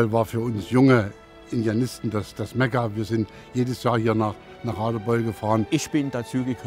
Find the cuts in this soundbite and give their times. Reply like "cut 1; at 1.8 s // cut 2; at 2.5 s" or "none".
cut 1; at 5.7 s